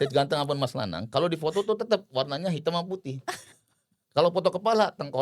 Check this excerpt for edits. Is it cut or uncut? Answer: uncut